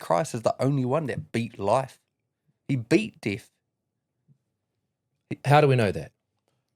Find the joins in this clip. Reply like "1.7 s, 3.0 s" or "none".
none